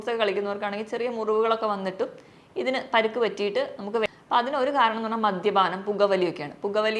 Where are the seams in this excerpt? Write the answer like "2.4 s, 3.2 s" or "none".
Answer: 4.1 s